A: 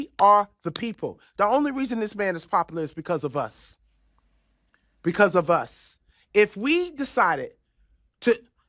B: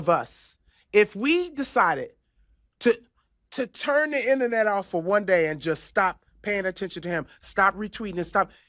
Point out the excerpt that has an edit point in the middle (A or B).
A